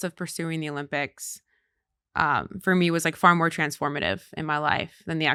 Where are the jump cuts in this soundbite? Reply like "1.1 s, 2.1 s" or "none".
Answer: none